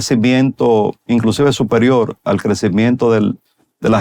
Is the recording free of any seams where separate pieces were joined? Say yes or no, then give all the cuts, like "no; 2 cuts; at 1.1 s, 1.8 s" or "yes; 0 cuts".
no; 1 cut; at 1.0 s